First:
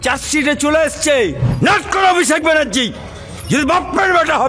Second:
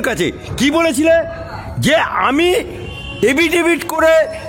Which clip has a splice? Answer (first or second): first